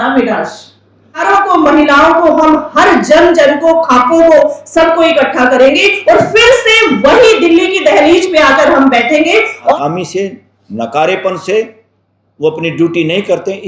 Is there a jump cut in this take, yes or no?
yes